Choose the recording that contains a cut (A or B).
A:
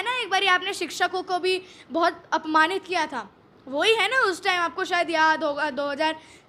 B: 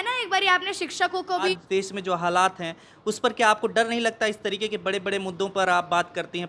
B